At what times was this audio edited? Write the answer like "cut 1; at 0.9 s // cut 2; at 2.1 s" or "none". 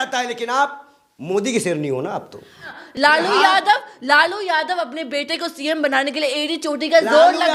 cut 1; at 2.7 s